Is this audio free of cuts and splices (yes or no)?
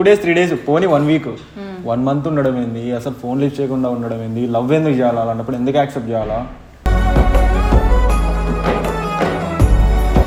yes